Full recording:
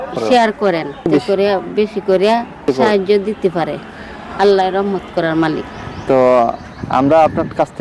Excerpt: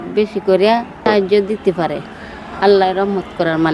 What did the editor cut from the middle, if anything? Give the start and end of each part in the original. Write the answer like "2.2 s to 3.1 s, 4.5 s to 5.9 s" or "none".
2.7 s to 2.8 s